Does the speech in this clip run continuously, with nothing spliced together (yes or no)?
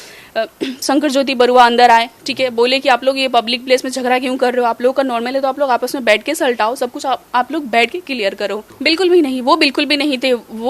no